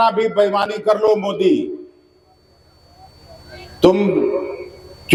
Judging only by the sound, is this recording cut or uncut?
uncut